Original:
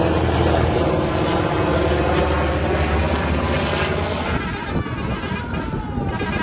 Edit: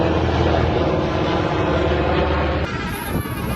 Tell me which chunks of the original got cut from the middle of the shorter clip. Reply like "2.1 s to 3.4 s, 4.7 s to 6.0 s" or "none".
2.7 s to 4.3 s